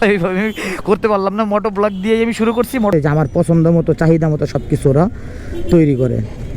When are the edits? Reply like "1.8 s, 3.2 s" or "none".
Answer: 2.9 s